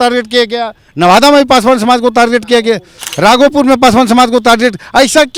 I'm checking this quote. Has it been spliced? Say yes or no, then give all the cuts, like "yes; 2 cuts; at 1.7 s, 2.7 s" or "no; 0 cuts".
no; 0 cuts